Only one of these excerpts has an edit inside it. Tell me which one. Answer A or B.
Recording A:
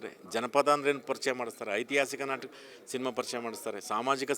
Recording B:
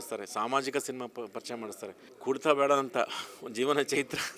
B